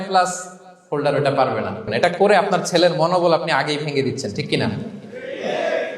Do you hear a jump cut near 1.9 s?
yes; 1 cut; at 1.9 s

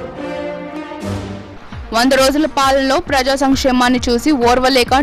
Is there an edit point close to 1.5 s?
yes; 1 cut; at 1.5 s

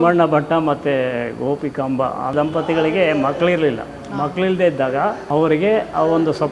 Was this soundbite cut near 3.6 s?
no; 2 cuts; at 2.3 s, 5.2 s

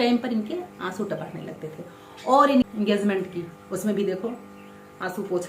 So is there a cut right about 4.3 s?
no; 1 cut; at 2.6 s

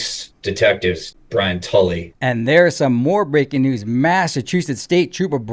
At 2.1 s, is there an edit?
yes; 2 cuts; at 1.1 s, 2.1 s

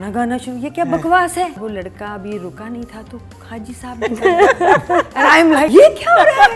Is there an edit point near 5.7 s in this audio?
yes; 2 cuts; at 1.6 s, 5.7 s

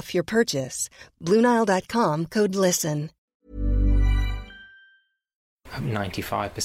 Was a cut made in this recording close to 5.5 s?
yes; 2 cuts; at 3.2 s, 5.5 s

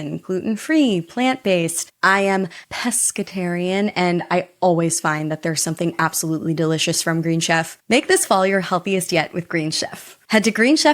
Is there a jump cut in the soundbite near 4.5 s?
no; 2 cuts; at 1.9 s, 7.8 s

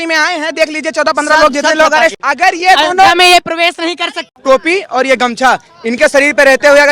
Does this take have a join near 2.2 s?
yes; 2 cuts; at 2.2 s, 4.3 s

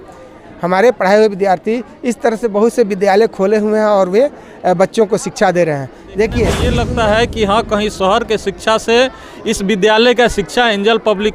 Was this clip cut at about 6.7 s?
yes; 1 cut; at 6.7 s

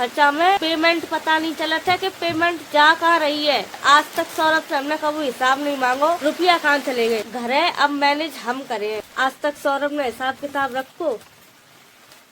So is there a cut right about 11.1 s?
no; 2 cuts; at 3.8 s, 7.3 s

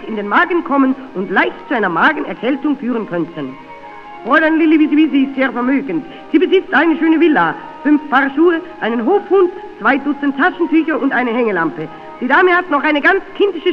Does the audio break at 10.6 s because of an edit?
no; 0 cuts

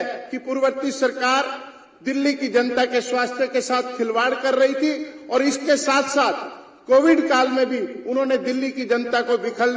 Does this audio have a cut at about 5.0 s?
no; 0 cuts

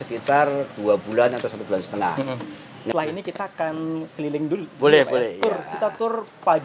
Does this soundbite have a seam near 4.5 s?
no; 1 cut; at 2.9 s

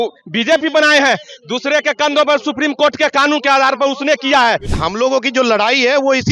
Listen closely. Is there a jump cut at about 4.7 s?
yes; 1 cut; at 4.7 s

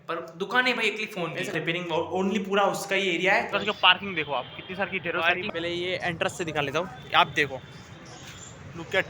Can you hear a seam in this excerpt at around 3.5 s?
yes; 3 cuts; at 1.5 s, 3.5 s, 5.4 s

